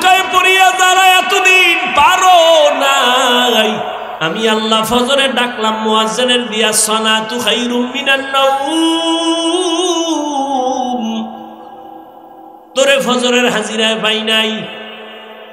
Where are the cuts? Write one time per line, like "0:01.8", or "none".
0:04.1